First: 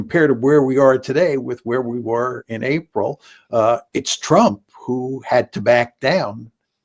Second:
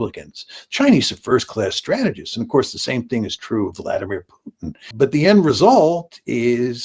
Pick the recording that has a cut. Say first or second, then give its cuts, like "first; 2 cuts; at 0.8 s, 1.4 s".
second; 1 cut; at 4.9 s